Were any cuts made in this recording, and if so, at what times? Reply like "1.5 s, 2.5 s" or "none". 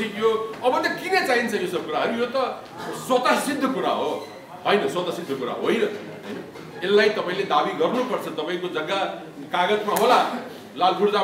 none